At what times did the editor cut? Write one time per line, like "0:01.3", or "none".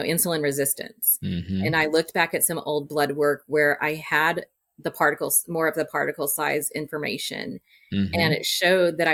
none